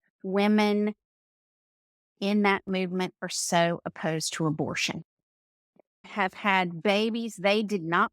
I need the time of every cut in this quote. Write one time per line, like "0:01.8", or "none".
0:06.1